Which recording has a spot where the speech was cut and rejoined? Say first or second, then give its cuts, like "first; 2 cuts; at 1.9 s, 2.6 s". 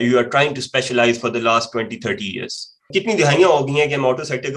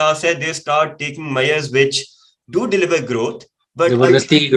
first; 1 cut; at 2.9 s